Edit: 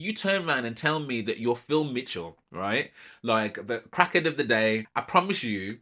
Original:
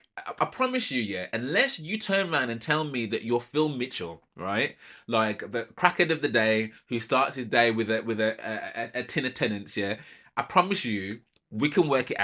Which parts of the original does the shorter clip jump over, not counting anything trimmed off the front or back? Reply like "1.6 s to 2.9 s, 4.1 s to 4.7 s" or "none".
6.8 s to 10.3 s